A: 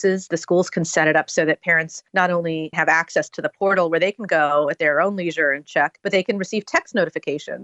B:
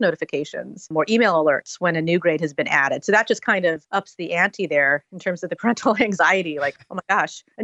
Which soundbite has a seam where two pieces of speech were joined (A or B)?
B